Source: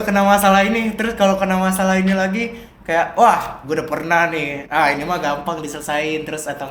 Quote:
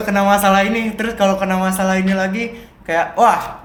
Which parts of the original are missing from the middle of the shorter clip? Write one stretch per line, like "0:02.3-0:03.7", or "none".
none